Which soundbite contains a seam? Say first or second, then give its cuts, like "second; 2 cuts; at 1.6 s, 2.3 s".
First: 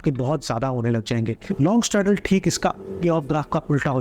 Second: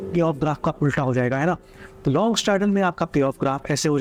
first; 1 cut; at 1.4 s